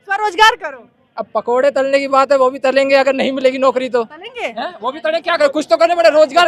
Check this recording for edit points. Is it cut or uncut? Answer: uncut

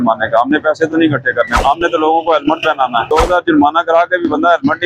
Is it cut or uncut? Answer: cut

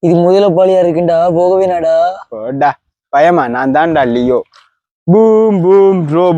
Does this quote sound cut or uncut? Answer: cut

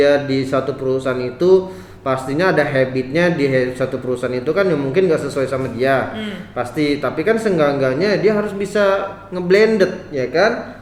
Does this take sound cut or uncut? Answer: uncut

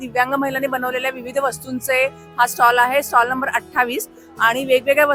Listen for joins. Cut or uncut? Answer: uncut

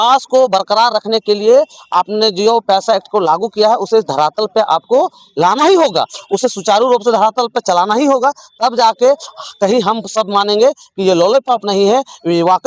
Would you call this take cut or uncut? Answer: uncut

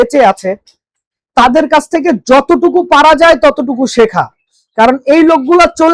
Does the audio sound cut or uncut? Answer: uncut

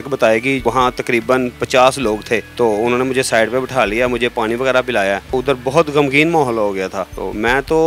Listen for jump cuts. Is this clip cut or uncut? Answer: uncut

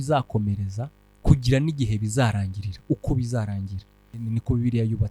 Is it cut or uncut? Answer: cut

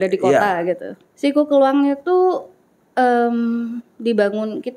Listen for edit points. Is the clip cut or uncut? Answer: cut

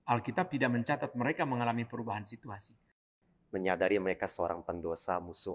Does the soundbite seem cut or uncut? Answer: cut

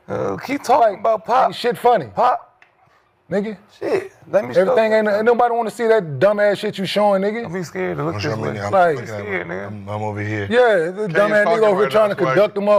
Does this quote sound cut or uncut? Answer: uncut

